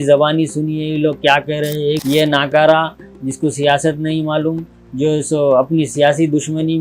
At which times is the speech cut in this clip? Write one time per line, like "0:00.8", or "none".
0:02.0